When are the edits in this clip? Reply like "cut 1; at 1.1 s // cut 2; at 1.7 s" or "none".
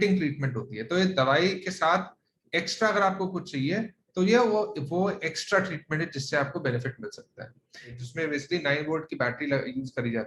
cut 1; at 8.0 s